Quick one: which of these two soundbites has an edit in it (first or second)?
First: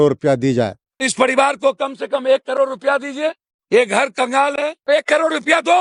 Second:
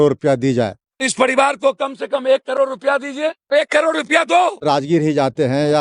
second